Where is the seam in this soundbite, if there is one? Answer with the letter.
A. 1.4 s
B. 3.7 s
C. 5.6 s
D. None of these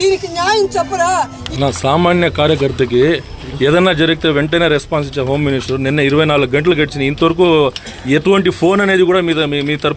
A